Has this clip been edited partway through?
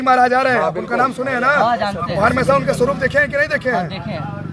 no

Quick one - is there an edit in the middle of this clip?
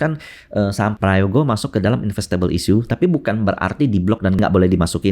yes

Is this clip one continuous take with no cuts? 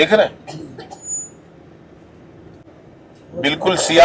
no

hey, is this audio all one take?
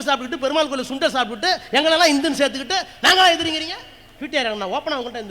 no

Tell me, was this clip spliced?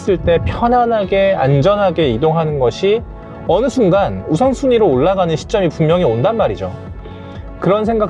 no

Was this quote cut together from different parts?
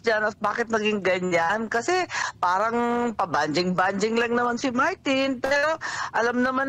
no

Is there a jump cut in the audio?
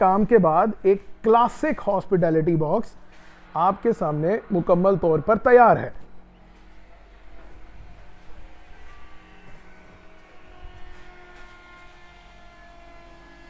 no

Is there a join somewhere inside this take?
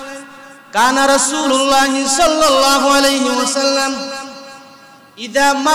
no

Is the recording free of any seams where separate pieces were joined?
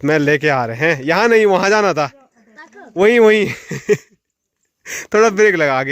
yes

